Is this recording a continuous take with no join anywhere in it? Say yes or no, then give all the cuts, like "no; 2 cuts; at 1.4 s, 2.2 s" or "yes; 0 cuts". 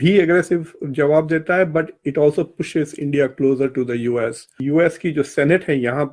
no; 1 cut; at 4.5 s